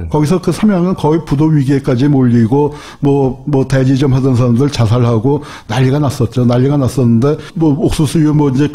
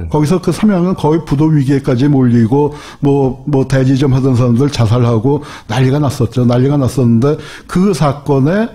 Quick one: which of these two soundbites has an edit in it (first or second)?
second